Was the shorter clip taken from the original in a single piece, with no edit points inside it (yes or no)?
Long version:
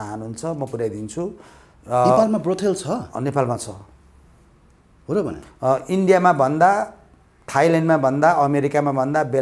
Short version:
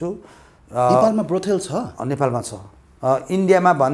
no